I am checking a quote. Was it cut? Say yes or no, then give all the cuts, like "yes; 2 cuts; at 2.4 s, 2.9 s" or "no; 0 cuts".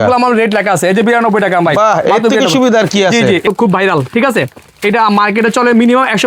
yes; 1 cut; at 3.4 s